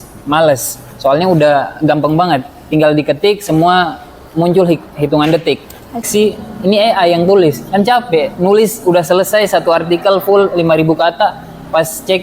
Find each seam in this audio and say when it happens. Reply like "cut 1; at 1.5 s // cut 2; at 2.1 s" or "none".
cut 1; at 6.1 s